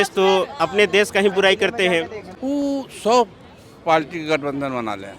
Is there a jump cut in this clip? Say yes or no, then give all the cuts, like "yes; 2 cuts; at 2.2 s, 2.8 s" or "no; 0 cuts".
yes; 1 cut; at 2.2 s